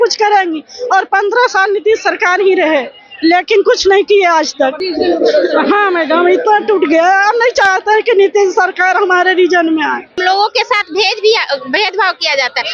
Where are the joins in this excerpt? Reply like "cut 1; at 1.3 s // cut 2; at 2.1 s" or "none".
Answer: cut 1; at 4.8 s // cut 2; at 10.2 s